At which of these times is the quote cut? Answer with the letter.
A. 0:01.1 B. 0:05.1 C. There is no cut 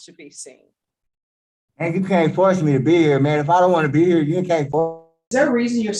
B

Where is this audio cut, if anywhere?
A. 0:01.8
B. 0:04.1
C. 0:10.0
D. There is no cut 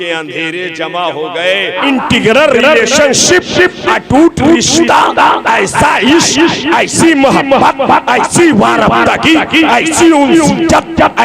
A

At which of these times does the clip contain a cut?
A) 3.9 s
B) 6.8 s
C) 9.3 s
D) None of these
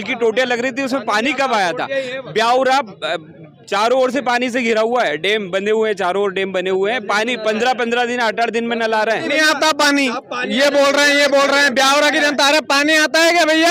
C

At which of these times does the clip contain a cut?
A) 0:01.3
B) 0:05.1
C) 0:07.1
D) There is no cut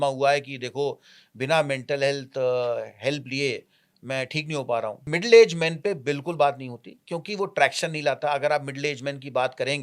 B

